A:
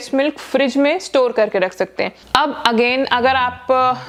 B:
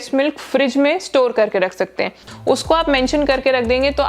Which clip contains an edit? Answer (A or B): B